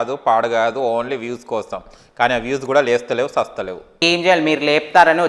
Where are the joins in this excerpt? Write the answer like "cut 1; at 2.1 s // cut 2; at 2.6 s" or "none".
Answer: cut 1; at 4.0 s